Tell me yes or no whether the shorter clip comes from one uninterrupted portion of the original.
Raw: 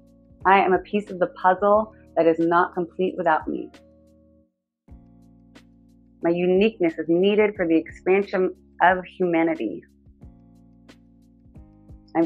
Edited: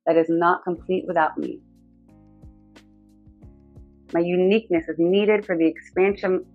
yes